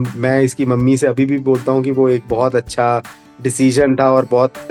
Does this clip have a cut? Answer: no; 0 cuts

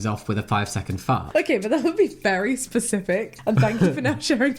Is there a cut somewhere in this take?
no; 0 cuts

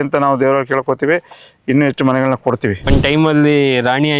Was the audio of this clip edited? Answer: yes; 1 cut; at 2.9 s

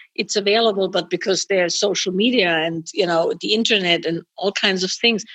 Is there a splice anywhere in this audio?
no; 0 cuts

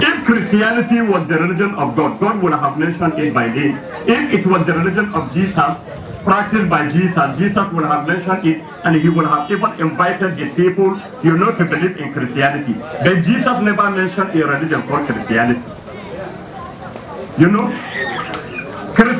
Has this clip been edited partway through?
no; 0 cuts

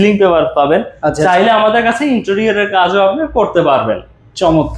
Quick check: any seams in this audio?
no; 0 cuts

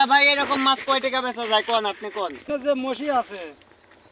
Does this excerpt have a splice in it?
yes; 1 cut; at 2.4 s

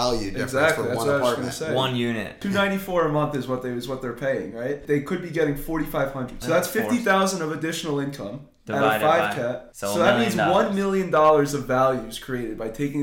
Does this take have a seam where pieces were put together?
yes; 4 cuts; at 2.4 s, 4.8 s, 6.4 s, 9.7 s

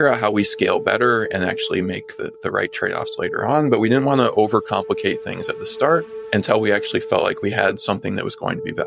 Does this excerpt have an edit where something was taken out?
yes; 1 cut; at 7.4 s

